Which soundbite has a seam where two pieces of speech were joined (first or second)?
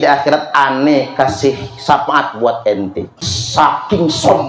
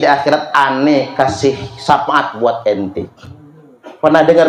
first